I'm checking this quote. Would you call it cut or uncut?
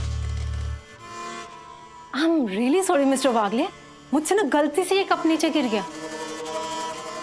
uncut